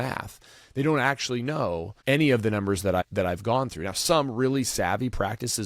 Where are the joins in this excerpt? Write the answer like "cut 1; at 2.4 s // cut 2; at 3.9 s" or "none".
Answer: cut 1; at 1.9 s // cut 2; at 3.0 s